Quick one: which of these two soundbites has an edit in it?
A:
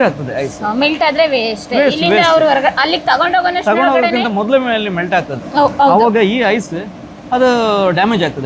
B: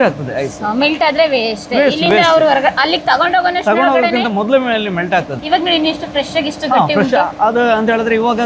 A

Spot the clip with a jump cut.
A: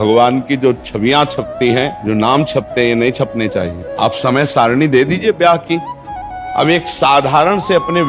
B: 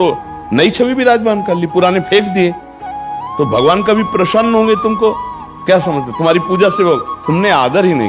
A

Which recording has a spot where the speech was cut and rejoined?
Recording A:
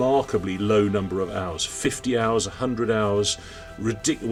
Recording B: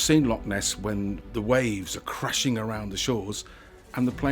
B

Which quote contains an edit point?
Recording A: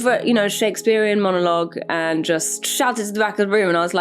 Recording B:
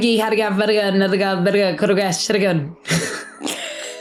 A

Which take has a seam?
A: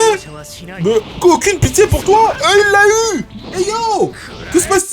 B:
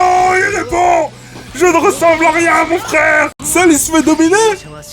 B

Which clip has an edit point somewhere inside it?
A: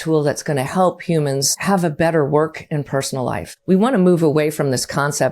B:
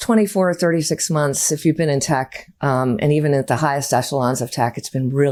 A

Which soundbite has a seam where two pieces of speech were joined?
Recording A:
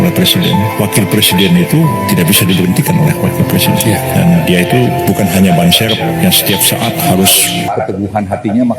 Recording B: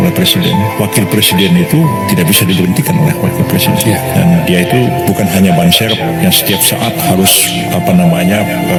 A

